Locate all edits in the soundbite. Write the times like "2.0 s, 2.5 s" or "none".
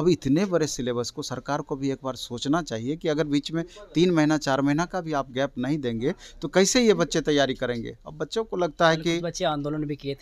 none